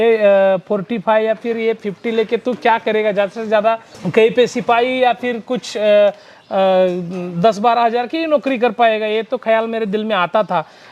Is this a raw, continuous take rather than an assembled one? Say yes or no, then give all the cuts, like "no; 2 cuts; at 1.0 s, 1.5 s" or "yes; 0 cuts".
no; 1 cut; at 3.9 s